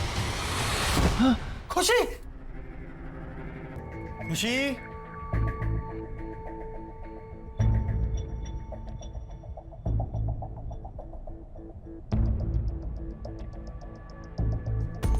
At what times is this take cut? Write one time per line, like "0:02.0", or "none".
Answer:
0:03.8